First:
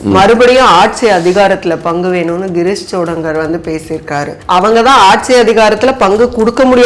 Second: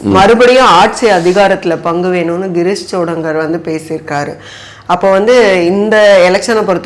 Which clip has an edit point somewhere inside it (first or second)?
first